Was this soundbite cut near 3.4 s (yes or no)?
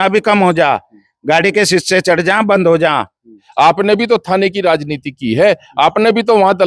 yes